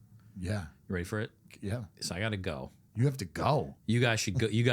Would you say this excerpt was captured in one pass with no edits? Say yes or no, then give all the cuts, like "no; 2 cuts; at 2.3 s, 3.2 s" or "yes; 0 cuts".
no; 2 cuts; at 2.8 s, 3.7 s